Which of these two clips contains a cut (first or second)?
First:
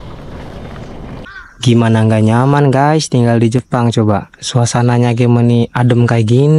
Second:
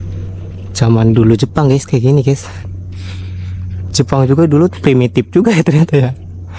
first